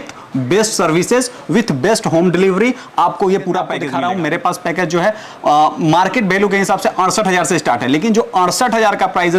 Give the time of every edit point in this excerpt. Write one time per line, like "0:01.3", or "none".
0:03.8